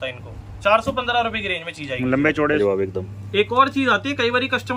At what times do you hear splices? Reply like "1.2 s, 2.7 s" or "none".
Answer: 2.6 s